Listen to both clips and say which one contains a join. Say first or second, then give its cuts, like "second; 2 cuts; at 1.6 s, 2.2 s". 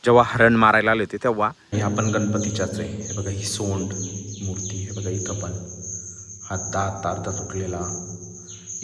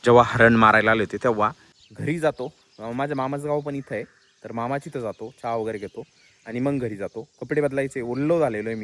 first; 1 cut; at 1.7 s